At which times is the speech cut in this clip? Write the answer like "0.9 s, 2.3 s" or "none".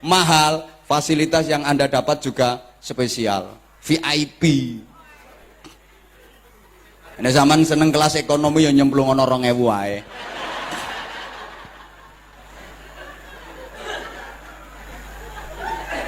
none